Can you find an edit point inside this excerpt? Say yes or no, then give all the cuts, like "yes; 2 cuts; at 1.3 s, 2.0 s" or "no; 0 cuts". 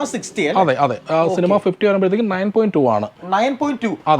no; 0 cuts